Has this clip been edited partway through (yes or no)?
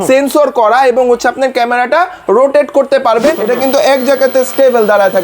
yes